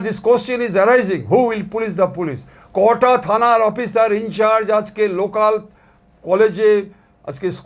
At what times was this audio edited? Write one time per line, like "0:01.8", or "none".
none